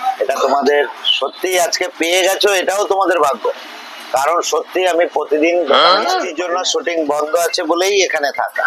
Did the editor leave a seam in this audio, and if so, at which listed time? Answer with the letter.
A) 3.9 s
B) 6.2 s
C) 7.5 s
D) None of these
B